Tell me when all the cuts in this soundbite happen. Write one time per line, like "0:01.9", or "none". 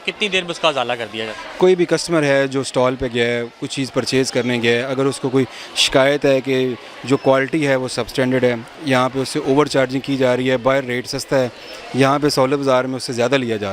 none